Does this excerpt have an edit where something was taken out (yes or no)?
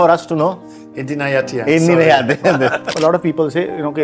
yes